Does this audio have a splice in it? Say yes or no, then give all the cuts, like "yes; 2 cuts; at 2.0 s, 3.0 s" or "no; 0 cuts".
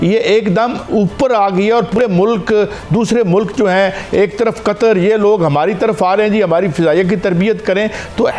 no; 0 cuts